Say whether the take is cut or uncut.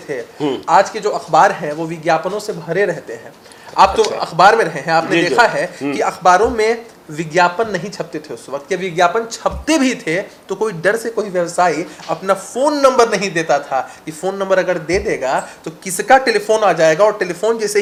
uncut